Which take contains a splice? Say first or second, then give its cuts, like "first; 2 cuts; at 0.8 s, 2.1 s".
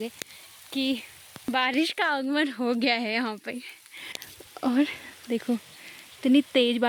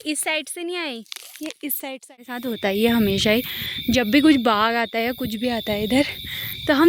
second; 1 cut; at 2.4 s